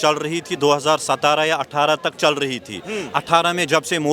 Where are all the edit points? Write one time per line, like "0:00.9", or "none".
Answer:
none